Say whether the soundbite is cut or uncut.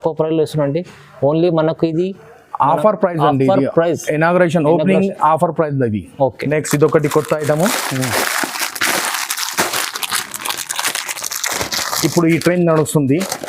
uncut